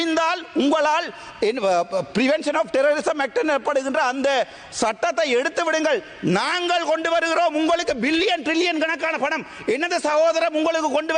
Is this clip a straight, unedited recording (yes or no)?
yes